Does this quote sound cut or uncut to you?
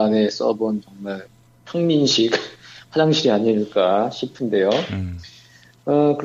uncut